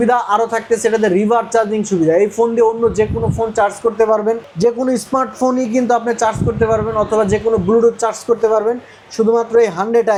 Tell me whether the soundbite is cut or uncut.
uncut